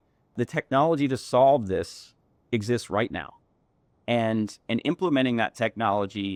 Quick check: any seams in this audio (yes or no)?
no